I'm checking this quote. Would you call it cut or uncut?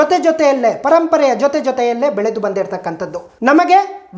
cut